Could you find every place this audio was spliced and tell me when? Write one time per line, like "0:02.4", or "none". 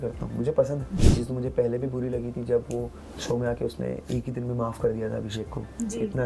0:00.9